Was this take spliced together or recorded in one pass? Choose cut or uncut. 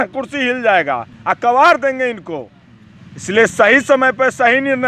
uncut